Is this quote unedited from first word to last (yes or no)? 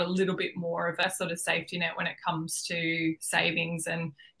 no